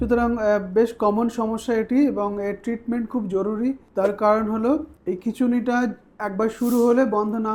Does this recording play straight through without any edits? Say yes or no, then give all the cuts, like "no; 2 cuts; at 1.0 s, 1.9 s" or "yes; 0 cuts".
yes; 0 cuts